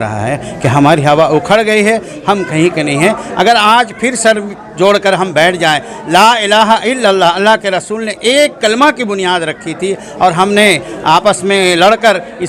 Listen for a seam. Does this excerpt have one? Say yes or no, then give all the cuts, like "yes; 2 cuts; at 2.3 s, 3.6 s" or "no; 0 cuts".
no; 0 cuts